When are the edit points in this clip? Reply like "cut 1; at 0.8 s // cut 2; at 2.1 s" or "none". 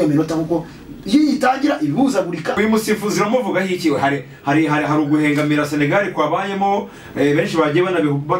cut 1; at 2.5 s